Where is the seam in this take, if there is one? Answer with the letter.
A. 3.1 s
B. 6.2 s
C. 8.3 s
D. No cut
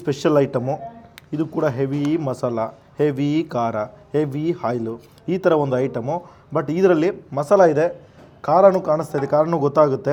D